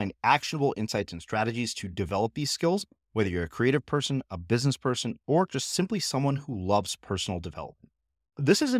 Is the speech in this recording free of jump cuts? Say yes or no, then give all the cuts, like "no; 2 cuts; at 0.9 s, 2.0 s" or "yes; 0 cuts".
yes; 0 cuts